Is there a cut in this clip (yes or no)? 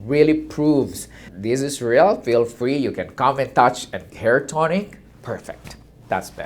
yes